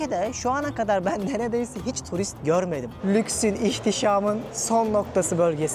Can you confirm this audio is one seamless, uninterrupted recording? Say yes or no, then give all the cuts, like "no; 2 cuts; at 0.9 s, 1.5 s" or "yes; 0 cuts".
no; 2 cuts; at 2.9 s, 4.5 s